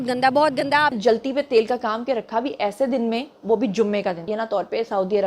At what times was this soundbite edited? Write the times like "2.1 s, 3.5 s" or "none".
0.9 s, 4.3 s